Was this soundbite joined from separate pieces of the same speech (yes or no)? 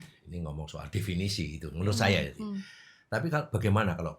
no